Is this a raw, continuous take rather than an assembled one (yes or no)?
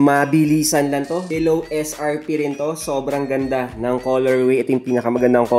yes